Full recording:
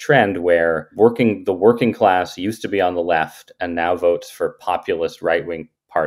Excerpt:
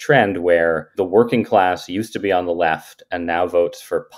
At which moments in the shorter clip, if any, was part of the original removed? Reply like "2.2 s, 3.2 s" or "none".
0.9 s